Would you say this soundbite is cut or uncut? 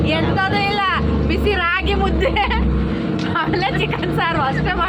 uncut